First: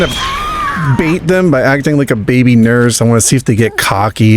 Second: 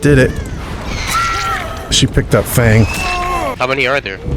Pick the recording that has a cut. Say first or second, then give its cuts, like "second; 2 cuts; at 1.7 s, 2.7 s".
second; 2 cuts; at 1.9 s, 3.6 s